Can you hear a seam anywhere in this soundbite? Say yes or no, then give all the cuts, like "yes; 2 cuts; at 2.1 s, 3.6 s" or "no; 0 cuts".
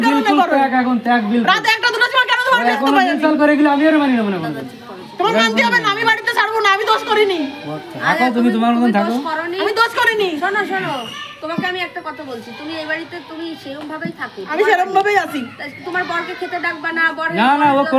no; 0 cuts